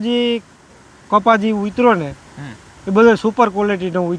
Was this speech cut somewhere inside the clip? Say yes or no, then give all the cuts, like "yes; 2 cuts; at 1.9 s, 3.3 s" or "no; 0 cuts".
no; 0 cuts